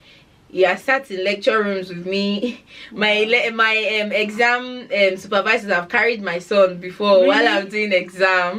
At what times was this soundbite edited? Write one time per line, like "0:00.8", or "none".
none